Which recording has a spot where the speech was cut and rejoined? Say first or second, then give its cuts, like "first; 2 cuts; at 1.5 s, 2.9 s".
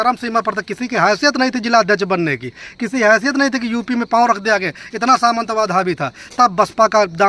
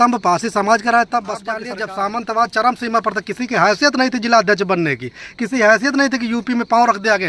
second; 1 cut; at 1.5 s